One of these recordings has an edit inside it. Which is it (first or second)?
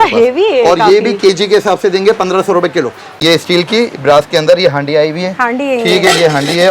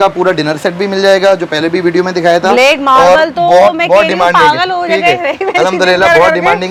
first